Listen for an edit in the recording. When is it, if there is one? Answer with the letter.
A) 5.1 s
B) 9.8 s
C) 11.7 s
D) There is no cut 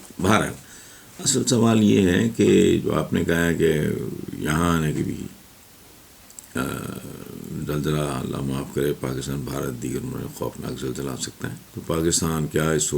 C